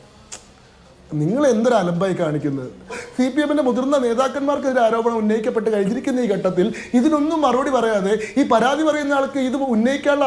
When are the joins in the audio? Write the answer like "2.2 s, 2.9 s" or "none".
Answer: 3.0 s